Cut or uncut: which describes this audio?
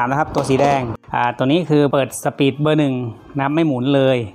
cut